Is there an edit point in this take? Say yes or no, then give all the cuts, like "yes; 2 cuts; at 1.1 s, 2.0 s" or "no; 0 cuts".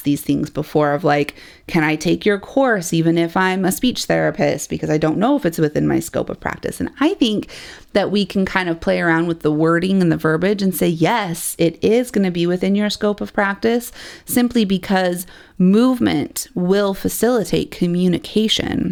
no; 0 cuts